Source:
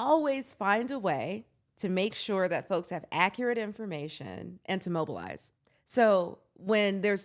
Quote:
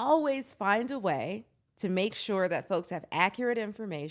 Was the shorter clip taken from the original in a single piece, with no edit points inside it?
yes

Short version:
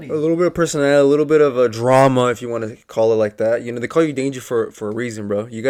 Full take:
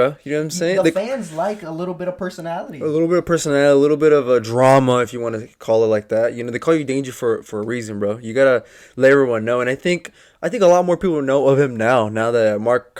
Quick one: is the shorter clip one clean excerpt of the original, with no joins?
yes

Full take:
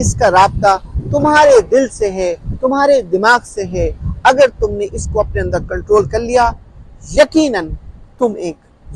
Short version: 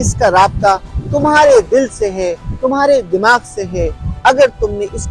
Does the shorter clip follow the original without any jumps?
yes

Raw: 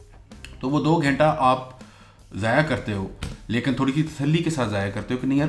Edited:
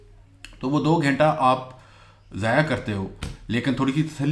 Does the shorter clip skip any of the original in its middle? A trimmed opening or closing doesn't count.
no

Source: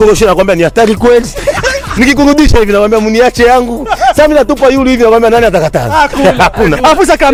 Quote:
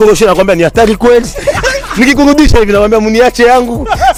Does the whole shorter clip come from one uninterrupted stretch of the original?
yes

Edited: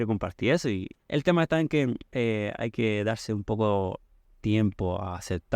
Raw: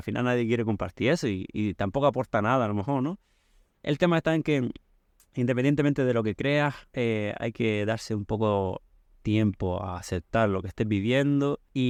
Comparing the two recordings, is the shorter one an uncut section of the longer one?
no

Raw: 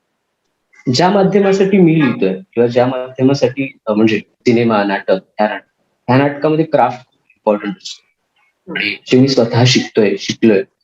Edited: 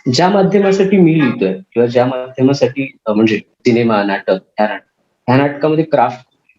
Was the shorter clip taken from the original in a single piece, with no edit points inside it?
yes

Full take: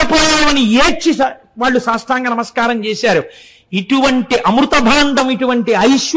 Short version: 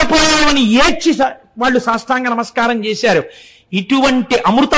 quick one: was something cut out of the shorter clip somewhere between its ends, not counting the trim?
no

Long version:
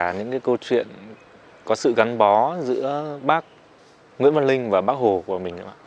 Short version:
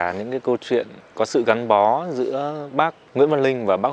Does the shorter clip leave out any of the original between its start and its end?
yes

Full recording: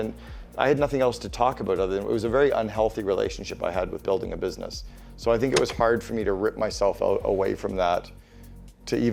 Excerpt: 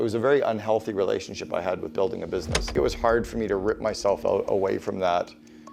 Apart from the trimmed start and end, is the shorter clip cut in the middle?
yes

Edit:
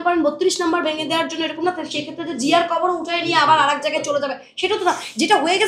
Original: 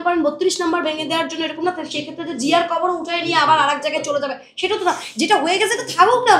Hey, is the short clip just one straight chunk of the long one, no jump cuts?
yes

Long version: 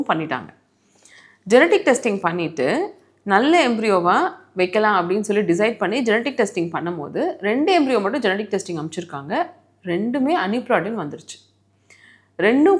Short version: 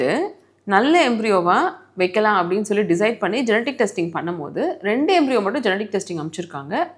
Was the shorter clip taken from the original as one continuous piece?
yes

